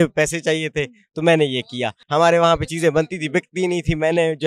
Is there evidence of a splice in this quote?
yes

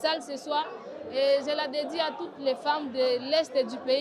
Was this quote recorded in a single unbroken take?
yes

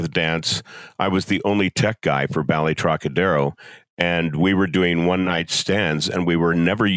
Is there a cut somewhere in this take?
no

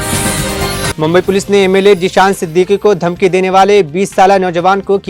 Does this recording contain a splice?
no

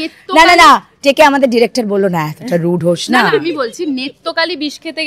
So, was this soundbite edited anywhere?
no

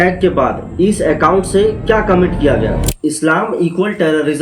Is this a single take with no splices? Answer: no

